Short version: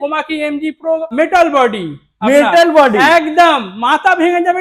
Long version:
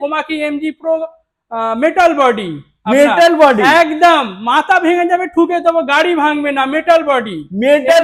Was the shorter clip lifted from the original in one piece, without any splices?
no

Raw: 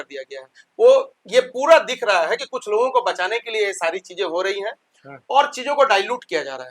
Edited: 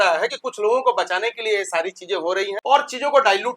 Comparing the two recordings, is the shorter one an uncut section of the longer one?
no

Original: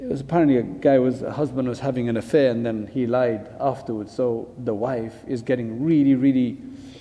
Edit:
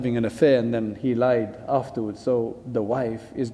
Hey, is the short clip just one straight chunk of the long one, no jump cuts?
yes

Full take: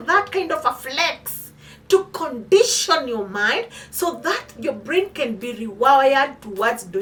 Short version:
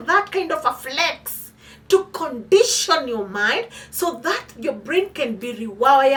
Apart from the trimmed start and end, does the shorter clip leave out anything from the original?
no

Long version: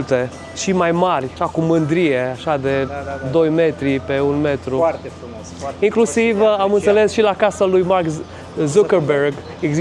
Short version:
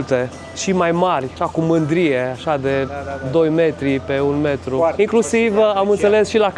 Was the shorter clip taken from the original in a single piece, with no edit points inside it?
no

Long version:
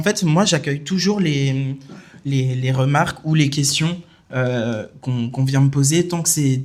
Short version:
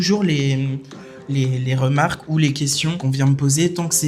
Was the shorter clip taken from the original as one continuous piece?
no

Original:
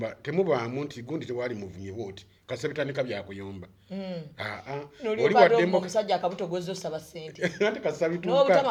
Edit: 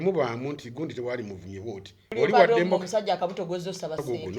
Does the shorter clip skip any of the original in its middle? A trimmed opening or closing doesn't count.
yes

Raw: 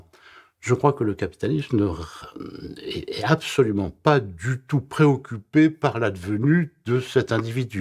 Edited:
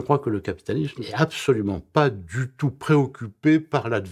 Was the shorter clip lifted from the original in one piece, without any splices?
no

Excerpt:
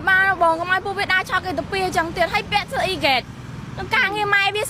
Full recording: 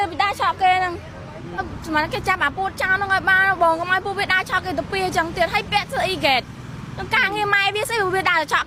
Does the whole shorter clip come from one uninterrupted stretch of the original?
yes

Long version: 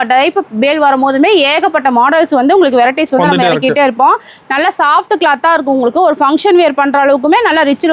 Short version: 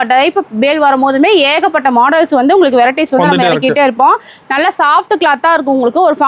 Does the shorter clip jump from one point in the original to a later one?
no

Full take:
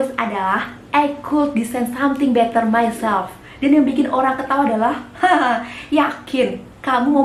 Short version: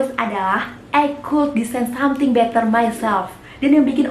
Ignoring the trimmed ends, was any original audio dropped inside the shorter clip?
no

